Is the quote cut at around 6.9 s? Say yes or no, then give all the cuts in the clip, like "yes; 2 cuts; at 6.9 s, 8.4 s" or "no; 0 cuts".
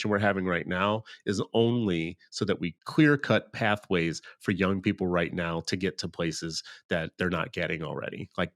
no; 1 cut; at 2.8 s